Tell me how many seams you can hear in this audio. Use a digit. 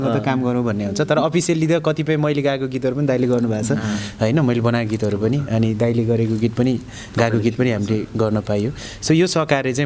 0